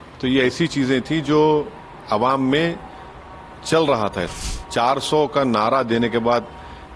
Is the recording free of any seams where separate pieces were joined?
no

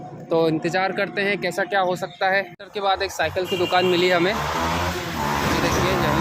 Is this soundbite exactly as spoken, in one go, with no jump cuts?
no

